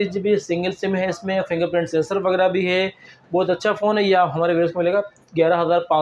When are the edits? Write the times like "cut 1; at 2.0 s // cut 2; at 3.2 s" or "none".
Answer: none